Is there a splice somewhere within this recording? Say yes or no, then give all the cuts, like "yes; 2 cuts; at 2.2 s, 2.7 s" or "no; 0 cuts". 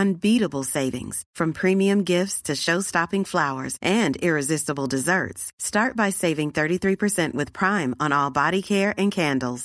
no; 0 cuts